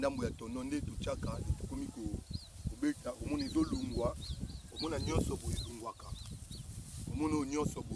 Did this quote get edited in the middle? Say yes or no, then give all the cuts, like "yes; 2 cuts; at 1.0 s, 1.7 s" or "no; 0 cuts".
no; 0 cuts